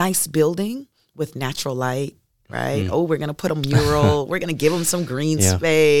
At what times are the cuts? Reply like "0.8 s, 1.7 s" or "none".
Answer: none